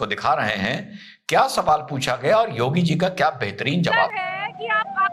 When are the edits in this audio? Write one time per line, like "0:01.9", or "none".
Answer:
0:04.1